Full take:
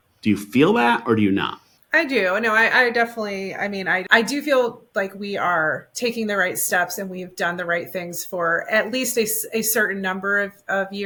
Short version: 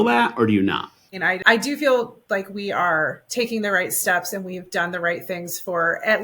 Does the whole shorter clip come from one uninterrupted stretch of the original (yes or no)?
no